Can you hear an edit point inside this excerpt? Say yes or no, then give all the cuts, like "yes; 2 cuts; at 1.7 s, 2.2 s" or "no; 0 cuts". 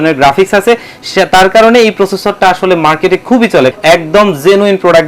yes; 1 cut; at 3.7 s